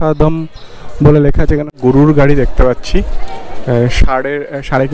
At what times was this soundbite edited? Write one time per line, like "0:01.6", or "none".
0:01.7